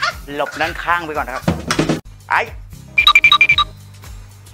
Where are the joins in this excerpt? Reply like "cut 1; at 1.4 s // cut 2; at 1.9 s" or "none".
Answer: cut 1; at 2.0 s